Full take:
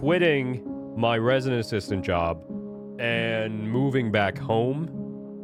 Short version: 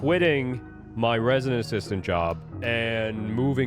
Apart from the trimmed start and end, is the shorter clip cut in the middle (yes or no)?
yes